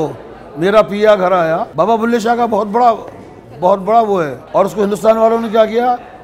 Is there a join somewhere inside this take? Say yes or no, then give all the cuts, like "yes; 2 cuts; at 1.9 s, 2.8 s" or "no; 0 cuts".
yes; 2 cuts; at 1.7 s, 4.4 s